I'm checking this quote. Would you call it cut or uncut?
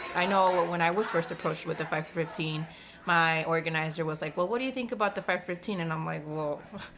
uncut